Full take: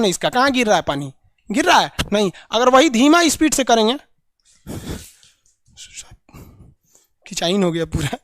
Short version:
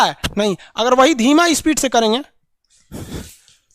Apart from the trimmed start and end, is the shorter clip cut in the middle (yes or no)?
no